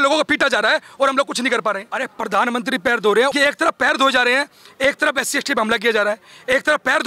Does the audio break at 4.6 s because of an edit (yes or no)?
no